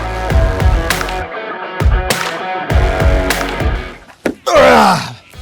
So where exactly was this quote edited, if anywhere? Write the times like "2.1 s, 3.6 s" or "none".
3.8 s

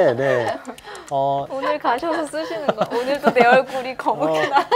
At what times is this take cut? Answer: 1.5 s

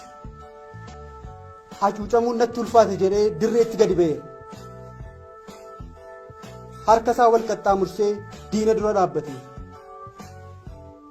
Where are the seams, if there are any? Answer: 0.9 s

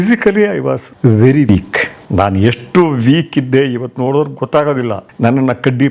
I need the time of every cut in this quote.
0.9 s, 1.5 s, 5.0 s

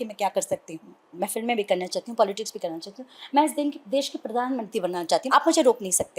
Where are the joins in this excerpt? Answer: 1.2 s, 5.2 s

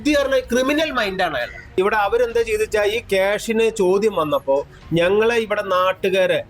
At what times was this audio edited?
1.8 s

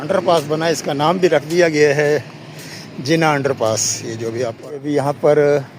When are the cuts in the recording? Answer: 4.8 s

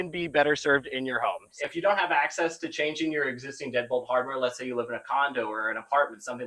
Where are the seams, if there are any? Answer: 1.5 s

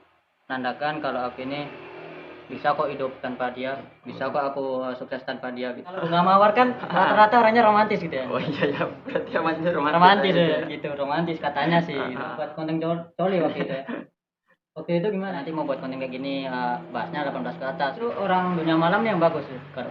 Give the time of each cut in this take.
6.0 s, 12.4 s, 15.3 s, 18.0 s

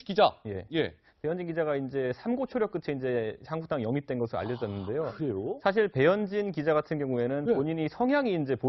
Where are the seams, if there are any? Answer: none

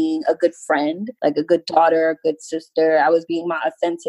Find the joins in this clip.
1.1 s

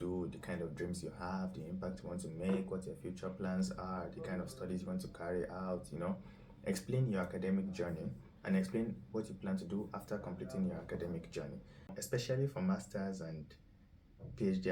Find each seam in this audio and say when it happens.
11.9 s

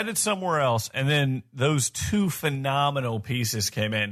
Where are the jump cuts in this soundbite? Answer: none

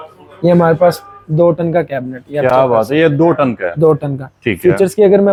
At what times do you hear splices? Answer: none

